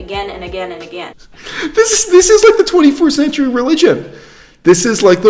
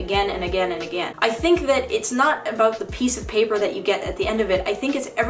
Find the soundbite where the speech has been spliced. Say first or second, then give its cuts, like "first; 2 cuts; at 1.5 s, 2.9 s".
first; 1 cut; at 1.1 s